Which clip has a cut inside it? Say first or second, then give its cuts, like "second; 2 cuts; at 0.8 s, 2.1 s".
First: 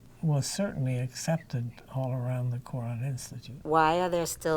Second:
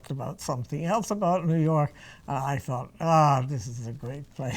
first; 1 cut; at 3.5 s